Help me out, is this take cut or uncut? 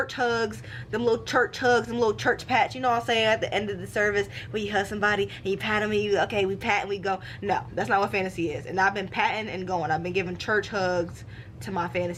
uncut